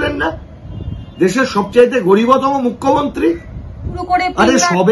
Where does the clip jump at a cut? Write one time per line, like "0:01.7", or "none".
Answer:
0:04.0